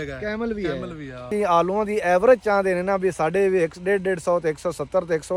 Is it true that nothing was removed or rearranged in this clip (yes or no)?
no